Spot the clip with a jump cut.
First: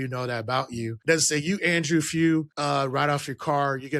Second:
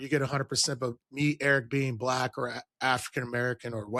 first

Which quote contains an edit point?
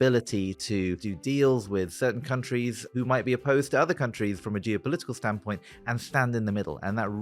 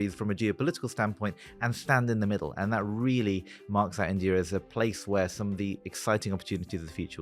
first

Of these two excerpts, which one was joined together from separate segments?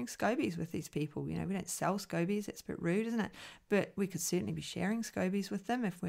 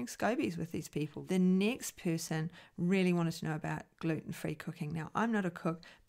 second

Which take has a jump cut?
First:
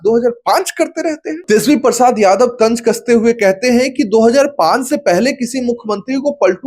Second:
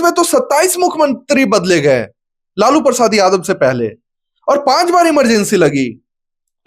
first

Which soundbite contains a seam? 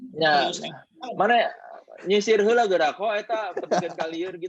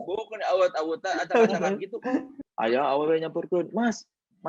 second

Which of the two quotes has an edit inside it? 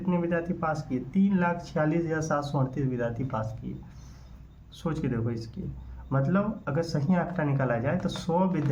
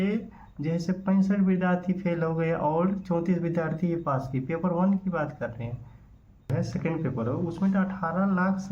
second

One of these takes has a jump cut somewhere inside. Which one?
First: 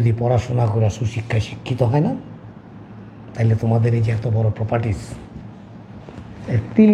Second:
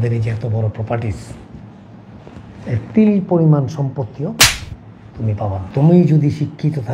second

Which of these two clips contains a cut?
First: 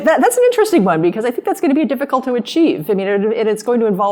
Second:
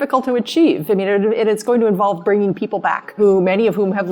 second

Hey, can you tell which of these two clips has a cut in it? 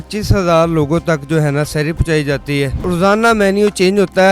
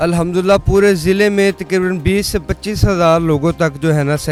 first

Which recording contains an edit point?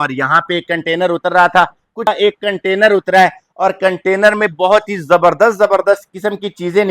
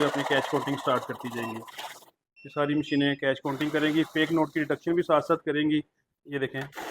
first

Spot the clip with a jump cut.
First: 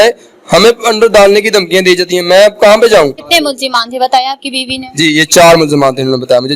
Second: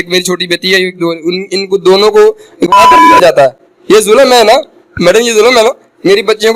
first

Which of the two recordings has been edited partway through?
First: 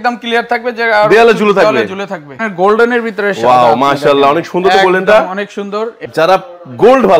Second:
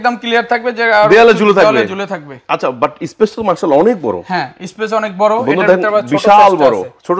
first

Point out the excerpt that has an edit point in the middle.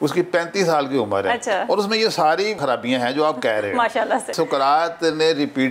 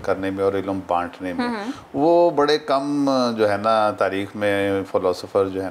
first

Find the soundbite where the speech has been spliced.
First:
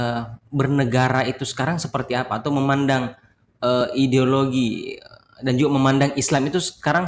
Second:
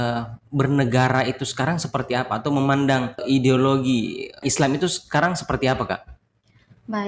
second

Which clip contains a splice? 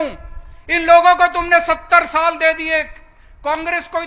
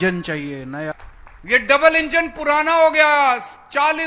second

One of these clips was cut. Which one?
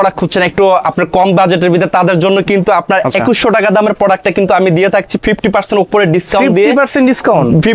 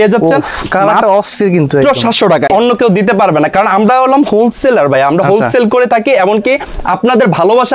second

